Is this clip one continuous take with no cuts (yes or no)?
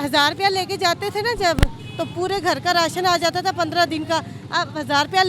yes